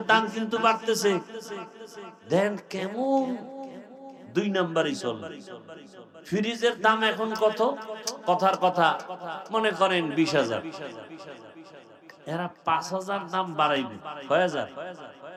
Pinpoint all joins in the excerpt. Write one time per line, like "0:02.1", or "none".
none